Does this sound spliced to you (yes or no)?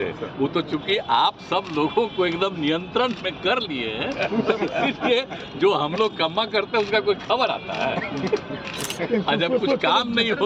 no